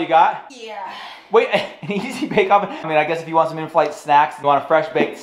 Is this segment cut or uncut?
uncut